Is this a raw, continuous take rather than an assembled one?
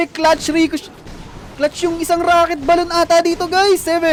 yes; 0 cuts

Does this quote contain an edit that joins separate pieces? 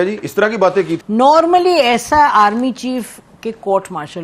no; 0 cuts

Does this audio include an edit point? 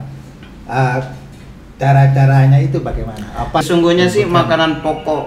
yes; 1 cut; at 3.6 s

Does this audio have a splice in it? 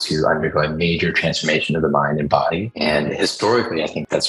no; 0 cuts

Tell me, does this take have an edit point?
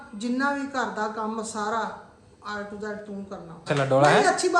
yes; 1 cut; at 3.7 s

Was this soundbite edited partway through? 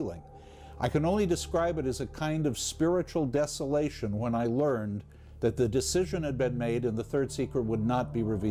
no; 0 cuts

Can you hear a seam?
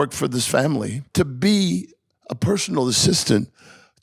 yes; 1 cut; at 1.0 s

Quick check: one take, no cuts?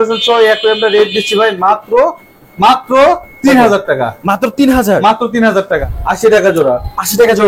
no; 1 cut; at 5.9 s

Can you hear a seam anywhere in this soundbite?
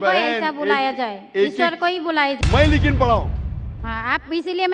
yes; 1 cut; at 2.4 s

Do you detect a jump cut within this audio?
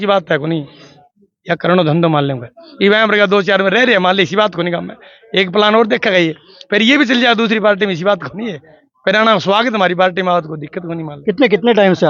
no; 0 cuts

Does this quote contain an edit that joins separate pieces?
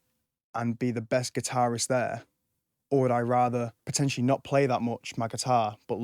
yes; 1 cut; at 3.8 s

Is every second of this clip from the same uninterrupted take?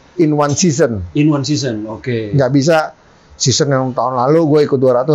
yes; 0 cuts

